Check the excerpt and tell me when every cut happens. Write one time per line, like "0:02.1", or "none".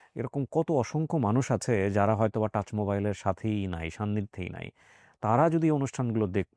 none